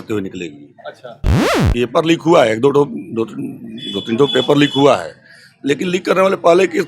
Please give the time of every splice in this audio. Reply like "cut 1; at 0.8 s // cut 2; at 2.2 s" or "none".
cut 1; at 1.5 s